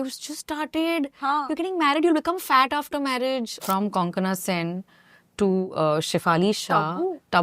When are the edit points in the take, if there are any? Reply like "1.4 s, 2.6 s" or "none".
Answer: 3.6 s

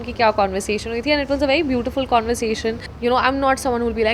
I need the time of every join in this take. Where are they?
2.9 s

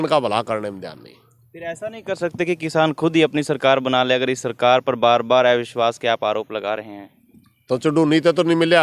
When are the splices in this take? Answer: none

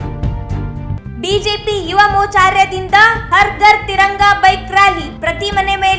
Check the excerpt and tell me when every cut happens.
none

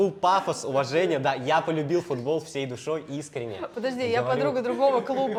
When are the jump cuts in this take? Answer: none

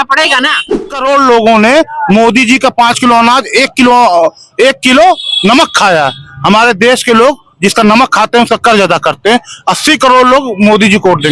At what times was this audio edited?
0.9 s

